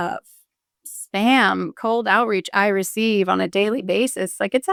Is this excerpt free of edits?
yes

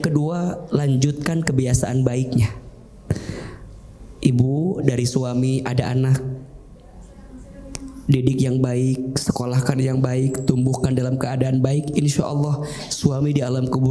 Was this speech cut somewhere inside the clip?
no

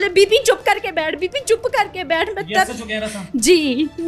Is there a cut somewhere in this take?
no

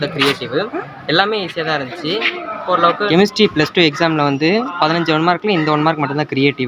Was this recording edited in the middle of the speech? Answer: yes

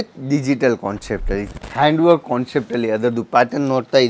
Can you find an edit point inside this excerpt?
yes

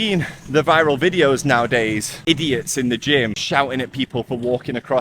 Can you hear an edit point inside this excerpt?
yes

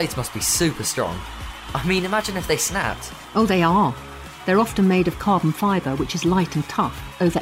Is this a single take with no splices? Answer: yes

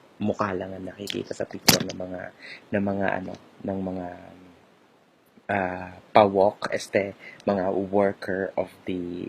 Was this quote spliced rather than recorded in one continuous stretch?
yes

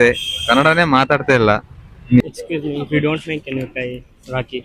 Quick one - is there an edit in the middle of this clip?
yes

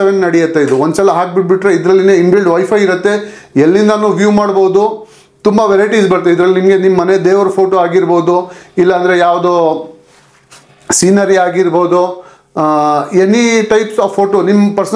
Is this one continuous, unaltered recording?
yes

